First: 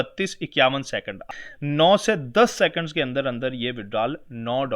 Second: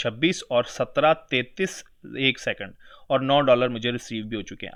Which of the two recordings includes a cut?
first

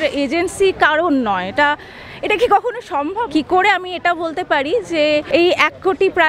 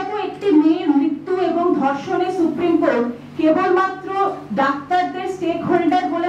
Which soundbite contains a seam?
first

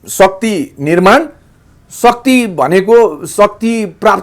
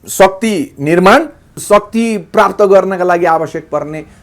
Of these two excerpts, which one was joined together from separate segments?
second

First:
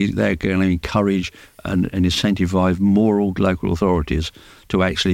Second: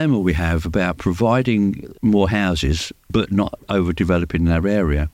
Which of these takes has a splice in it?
second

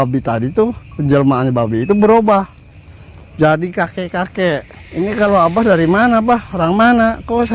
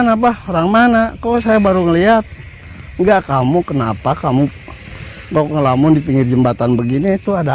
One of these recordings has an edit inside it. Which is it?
first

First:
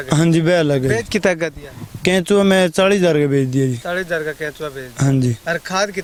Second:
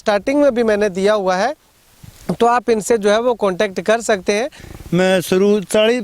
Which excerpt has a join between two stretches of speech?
second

